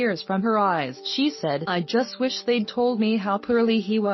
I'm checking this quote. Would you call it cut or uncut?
uncut